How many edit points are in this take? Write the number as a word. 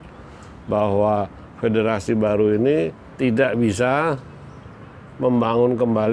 one